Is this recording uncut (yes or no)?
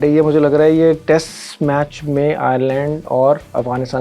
yes